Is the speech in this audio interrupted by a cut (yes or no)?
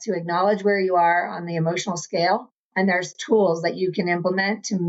yes